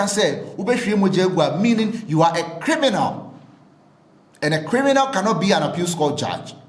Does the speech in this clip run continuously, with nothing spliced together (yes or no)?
yes